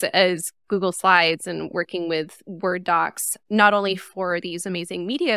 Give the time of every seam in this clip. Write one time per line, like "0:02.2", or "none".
0:02.4